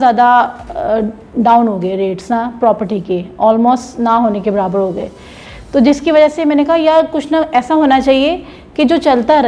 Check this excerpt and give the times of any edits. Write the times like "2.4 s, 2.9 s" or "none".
none